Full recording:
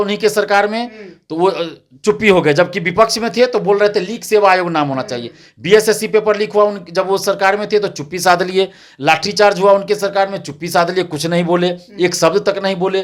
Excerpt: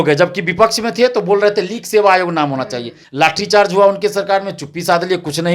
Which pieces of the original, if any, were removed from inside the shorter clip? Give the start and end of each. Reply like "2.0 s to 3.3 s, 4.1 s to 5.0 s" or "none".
5.4 s to 8.8 s